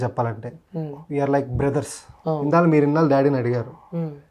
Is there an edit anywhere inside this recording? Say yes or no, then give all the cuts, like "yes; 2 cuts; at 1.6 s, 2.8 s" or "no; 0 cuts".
yes; 1 cut; at 2.4 s